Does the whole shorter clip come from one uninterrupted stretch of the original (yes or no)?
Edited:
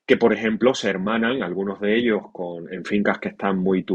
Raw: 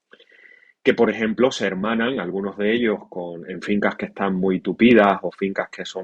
yes